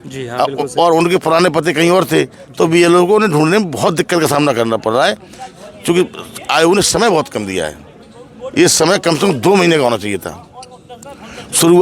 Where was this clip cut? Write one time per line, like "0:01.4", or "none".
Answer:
none